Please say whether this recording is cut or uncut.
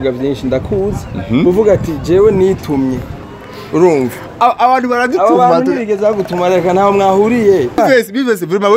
cut